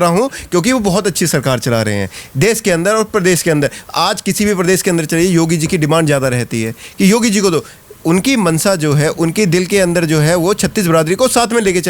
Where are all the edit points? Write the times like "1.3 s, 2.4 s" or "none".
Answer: none